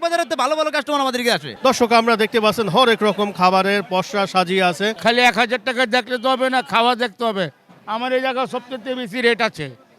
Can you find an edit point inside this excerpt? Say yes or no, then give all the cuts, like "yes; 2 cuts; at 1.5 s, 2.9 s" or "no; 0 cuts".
yes; 2 cuts; at 1.5 s, 5.0 s